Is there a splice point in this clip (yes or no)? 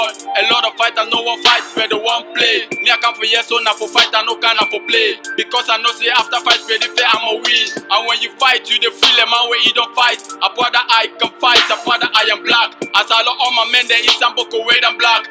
yes